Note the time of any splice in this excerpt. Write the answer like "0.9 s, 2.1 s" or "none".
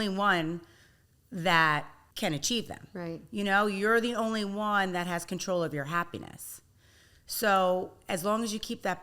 2.0 s